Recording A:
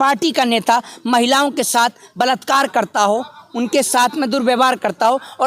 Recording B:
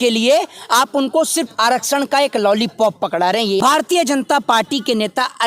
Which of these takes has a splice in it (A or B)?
B